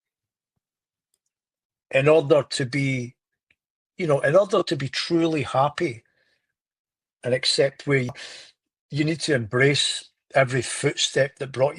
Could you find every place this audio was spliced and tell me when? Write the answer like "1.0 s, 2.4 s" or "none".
8.1 s